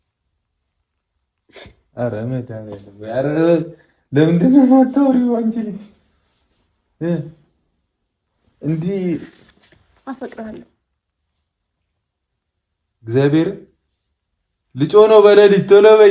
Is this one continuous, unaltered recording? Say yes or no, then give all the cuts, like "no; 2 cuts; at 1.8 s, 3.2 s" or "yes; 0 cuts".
yes; 0 cuts